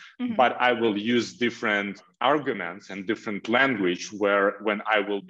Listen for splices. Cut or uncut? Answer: cut